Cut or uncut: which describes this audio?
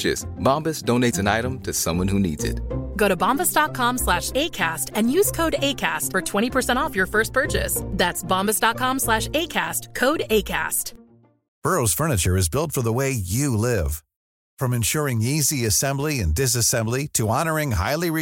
cut